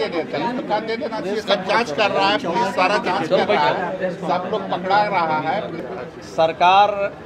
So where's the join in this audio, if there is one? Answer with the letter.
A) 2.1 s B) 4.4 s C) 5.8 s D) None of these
C